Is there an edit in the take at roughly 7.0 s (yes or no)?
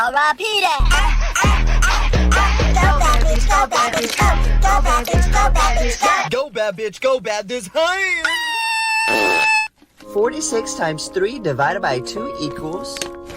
no